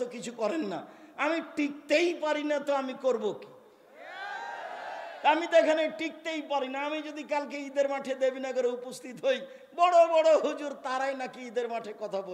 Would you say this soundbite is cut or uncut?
uncut